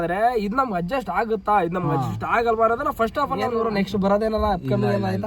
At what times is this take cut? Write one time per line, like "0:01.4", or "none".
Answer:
0:03.5